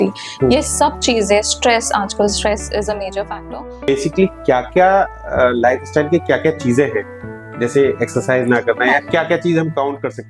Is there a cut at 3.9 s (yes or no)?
yes